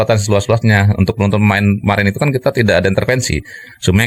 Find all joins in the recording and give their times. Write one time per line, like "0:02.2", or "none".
none